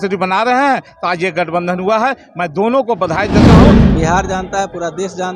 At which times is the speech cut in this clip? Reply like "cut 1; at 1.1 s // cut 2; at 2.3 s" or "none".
cut 1; at 3.3 s // cut 2; at 4.0 s